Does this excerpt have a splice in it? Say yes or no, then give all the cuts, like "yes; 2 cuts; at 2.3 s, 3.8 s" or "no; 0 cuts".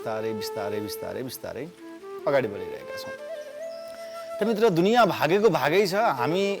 no; 0 cuts